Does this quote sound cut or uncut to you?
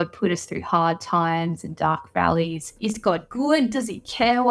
cut